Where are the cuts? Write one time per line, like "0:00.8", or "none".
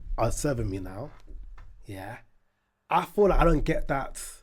none